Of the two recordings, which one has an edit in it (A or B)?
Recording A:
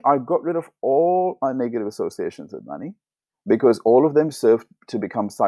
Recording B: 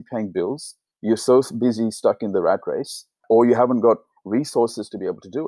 B